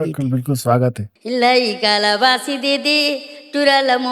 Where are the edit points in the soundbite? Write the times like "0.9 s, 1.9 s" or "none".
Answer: 1.1 s